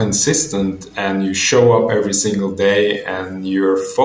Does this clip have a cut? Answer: no; 0 cuts

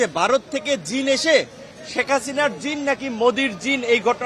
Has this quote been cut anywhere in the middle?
no; 0 cuts

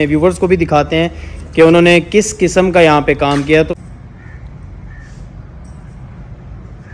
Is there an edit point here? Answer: yes; 1 cut; at 3.7 s

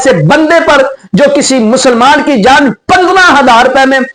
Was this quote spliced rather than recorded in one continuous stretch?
no; 0 cuts

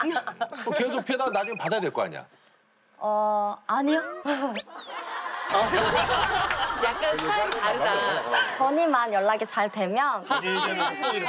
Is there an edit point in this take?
yes; 1 cut; at 10.2 s

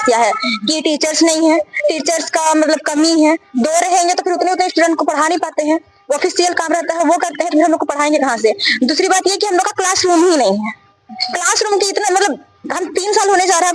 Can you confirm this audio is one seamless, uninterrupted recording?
yes; 0 cuts

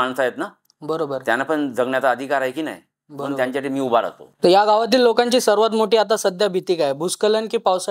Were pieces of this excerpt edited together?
no; 0 cuts

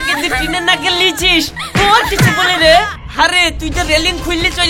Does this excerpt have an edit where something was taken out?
yes; 1 cut; at 3.0 s

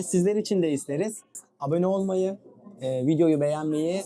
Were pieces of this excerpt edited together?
yes; 1 cut; at 1.3 s

